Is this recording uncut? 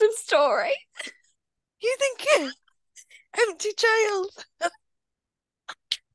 yes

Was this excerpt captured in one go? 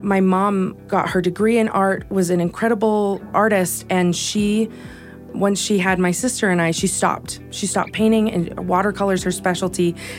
no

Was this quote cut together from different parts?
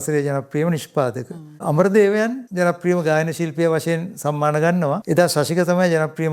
yes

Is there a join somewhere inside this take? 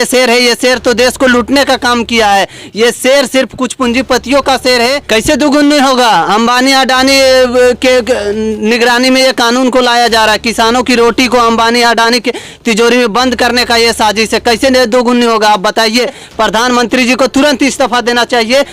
yes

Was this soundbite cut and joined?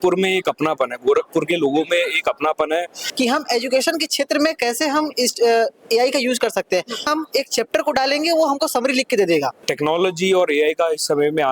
yes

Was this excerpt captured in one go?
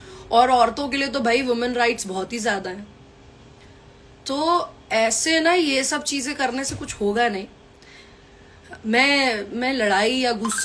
yes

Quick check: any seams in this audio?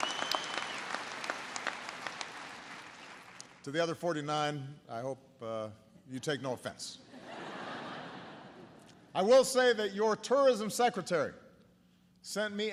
no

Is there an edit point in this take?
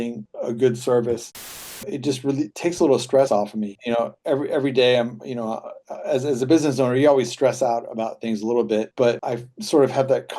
yes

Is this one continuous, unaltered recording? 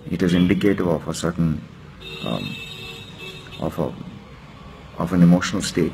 yes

